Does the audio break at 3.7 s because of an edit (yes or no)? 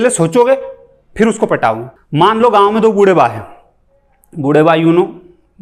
no